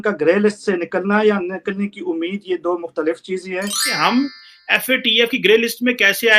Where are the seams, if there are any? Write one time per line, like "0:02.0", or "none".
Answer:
0:03.9